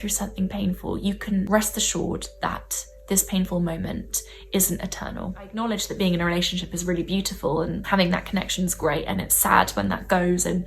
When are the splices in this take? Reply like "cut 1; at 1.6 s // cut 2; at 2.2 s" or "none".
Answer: cut 1; at 1.5 s // cut 2; at 5.5 s // cut 3; at 7.8 s